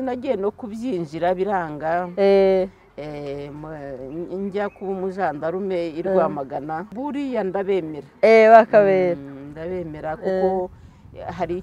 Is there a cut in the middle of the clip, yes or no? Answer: yes